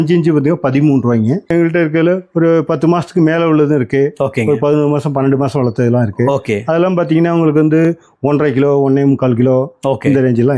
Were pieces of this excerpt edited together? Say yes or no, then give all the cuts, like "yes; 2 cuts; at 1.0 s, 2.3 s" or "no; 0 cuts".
yes; 1 cut; at 1.5 s